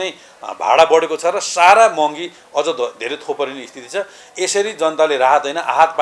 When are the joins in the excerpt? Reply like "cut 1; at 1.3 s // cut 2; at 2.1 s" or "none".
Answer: none